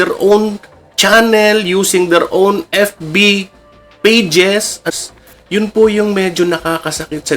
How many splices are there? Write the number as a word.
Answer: one